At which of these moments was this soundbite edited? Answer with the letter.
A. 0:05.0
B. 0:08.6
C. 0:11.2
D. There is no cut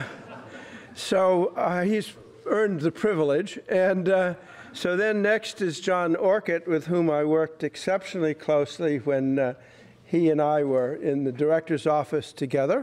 C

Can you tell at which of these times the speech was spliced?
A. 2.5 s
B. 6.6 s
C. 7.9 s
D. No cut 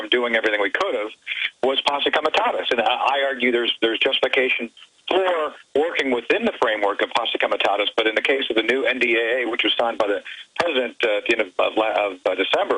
D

